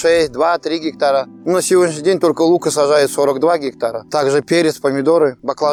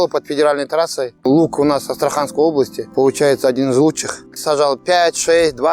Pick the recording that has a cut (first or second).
second